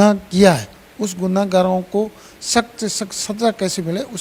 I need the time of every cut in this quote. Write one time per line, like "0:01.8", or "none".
none